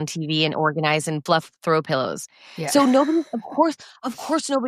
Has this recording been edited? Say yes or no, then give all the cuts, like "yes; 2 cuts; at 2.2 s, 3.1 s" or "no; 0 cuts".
yes; 1 cut; at 1.2 s